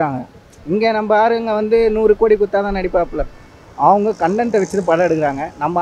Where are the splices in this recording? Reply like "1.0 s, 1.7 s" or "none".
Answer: none